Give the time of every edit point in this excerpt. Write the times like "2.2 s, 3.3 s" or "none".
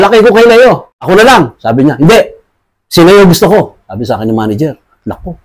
1.0 s